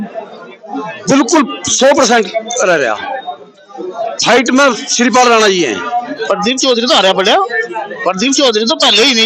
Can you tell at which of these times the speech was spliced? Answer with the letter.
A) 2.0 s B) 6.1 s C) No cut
B